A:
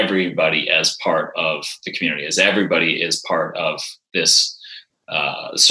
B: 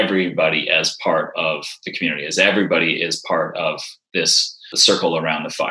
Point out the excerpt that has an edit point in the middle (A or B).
B